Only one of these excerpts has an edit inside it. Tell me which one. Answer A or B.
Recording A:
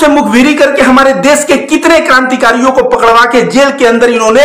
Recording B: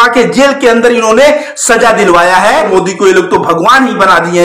B